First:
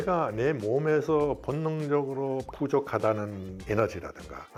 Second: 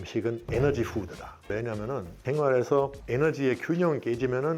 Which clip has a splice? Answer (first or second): second